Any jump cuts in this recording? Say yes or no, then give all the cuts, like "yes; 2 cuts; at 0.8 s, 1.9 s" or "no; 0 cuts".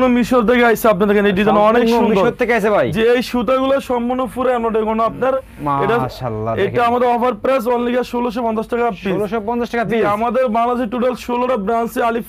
no; 0 cuts